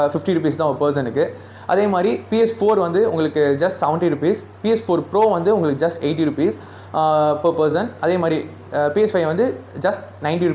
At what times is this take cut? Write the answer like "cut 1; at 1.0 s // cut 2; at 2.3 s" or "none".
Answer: none